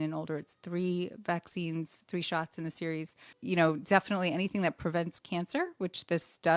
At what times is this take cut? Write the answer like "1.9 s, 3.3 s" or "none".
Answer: 3.4 s